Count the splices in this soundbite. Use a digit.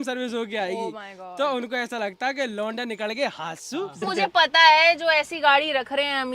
1